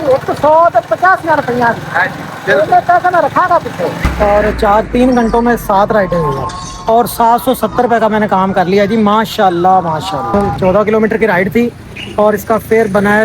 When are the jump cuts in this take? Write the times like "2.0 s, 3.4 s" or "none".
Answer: 4.0 s, 10.3 s